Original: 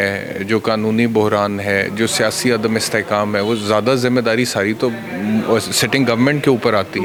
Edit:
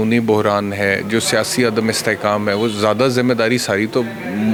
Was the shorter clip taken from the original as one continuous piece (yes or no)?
yes